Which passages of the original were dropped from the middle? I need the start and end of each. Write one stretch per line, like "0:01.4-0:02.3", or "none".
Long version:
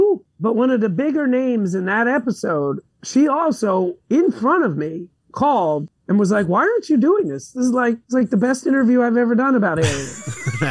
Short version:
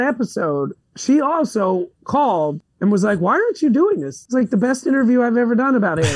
0:04.0-0:05.2
0:07.5-0:08.0